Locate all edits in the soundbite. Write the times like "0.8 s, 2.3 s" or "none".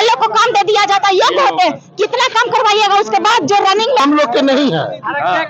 4.0 s